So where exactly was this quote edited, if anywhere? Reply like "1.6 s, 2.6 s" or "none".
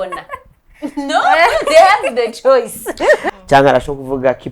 3.2 s